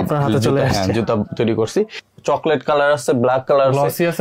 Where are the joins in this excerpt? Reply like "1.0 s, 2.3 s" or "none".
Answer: 2.0 s